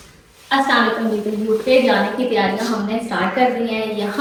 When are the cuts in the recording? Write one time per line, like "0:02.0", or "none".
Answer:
none